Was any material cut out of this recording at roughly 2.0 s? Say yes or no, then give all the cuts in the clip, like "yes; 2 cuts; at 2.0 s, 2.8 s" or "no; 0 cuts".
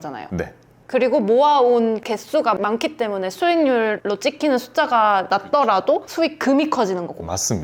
yes; 3 cuts; at 2.0 s, 4.0 s, 5.3 s